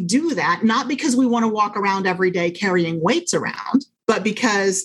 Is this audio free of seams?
no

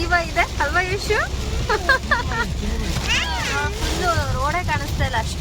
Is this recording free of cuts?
yes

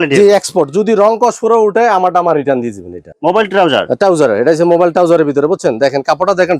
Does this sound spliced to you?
yes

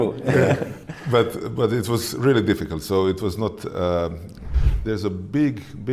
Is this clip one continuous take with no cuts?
no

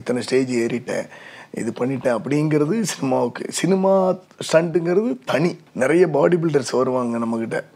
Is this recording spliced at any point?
yes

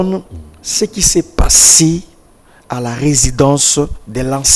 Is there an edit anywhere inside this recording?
no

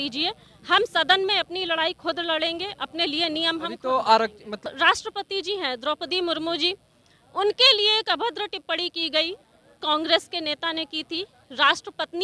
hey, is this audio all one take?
no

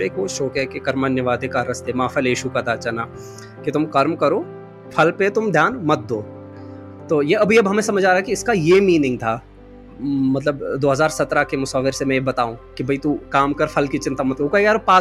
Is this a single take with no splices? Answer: no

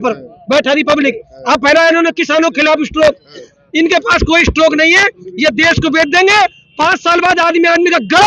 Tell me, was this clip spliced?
no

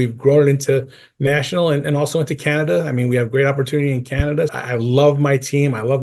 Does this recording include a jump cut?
yes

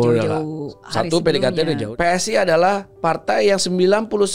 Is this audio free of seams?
no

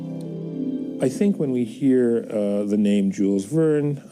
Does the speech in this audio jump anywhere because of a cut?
yes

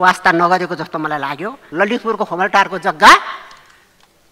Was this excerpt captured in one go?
no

